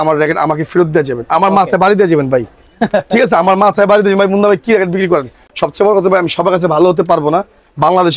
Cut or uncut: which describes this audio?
uncut